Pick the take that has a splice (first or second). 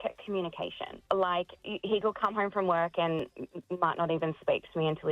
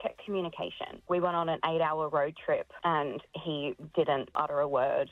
second